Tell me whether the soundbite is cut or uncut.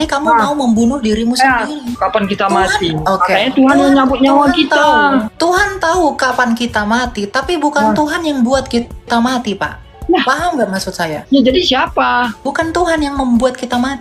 cut